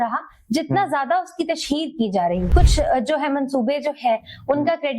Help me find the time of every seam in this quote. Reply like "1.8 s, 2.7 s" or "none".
2.5 s